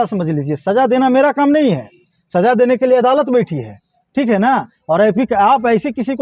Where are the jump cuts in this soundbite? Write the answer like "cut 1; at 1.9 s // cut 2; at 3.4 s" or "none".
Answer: none